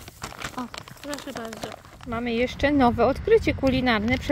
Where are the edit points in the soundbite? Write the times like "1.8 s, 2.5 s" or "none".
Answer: 2.2 s

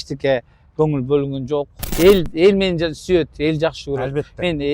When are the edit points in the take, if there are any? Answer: 1.8 s

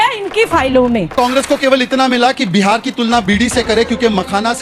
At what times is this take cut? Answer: 1.1 s

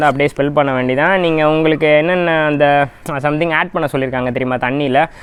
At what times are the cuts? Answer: none

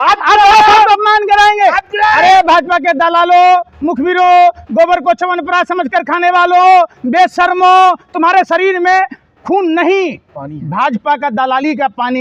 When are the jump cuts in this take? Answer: none

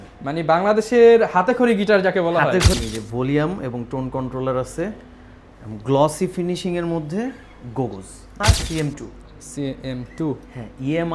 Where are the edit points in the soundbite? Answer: 2.8 s, 8.4 s

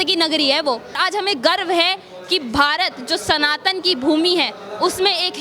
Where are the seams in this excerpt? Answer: 1.0 s

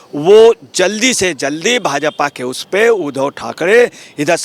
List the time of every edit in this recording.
none

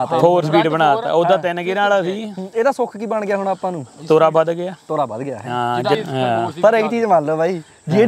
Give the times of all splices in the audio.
6.0 s

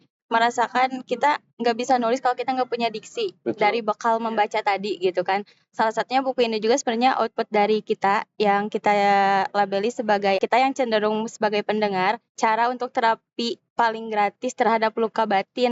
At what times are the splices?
10.4 s, 12.3 s

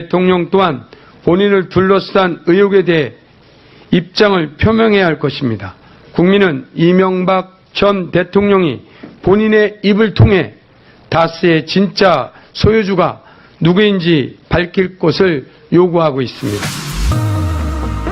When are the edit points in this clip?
16.4 s

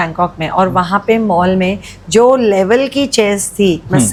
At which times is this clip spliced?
none

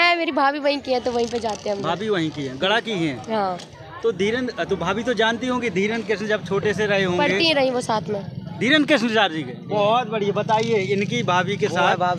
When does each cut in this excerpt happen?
none

